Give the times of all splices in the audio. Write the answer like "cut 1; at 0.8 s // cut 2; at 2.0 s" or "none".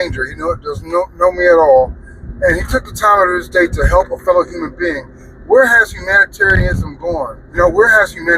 cut 1; at 7.4 s